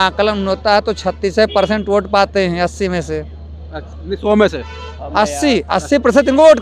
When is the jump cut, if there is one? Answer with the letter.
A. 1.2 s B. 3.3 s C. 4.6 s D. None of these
D